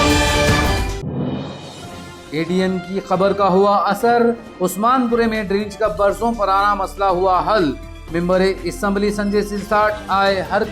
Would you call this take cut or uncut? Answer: cut